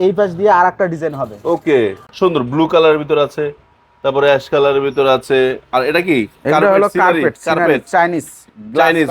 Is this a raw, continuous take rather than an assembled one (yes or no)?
no